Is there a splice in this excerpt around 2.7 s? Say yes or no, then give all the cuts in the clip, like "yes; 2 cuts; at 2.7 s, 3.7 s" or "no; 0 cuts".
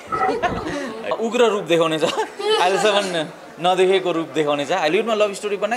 no; 2 cuts; at 1.1 s, 4.9 s